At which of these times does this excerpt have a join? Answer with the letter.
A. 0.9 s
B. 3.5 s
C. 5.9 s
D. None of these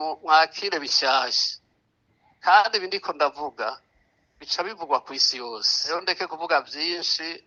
C